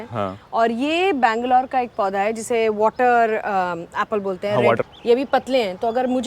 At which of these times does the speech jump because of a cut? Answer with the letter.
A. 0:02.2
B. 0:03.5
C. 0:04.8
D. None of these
C